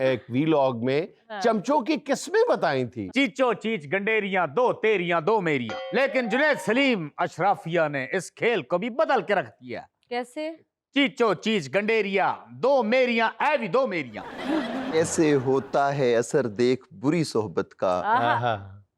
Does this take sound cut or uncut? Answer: cut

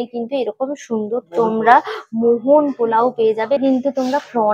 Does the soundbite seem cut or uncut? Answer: uncut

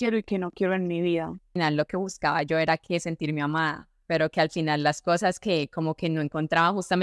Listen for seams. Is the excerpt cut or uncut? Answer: cut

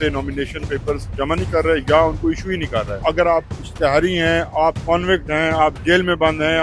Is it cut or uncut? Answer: cut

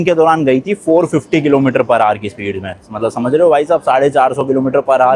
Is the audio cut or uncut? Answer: uncut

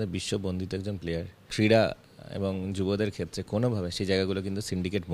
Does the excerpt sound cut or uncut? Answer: cut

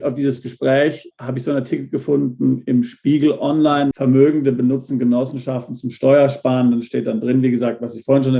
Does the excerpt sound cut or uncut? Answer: cut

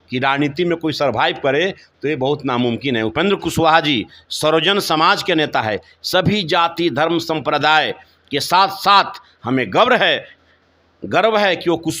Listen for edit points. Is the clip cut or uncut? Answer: uncut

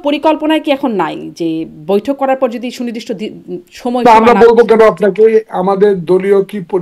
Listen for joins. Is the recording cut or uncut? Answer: uncut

